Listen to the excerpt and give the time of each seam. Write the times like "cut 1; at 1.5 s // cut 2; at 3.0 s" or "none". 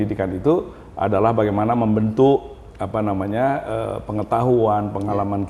none